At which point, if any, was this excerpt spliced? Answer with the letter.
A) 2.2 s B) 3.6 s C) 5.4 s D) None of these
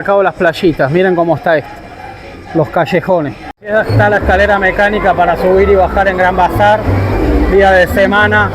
B